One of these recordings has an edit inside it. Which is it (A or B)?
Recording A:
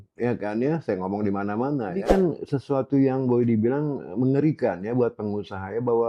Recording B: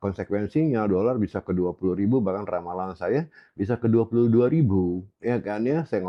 A